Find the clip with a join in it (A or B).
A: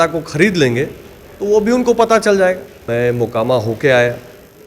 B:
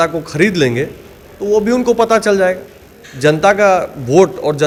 A